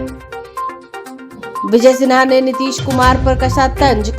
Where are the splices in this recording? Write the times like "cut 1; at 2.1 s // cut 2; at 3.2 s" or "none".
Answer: cut 1; at 1.2 s